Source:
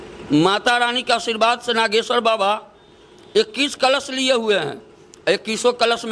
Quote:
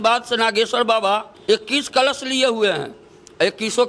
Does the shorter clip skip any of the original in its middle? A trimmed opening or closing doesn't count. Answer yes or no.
yes